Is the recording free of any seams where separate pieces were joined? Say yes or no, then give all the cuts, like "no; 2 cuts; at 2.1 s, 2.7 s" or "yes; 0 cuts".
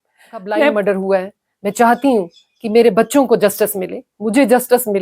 no; 1 cut; at 1.0 s